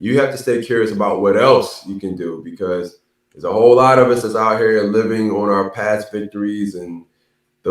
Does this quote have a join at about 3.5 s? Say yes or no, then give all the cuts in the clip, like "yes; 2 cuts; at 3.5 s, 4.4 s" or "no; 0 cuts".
no; 0 cuts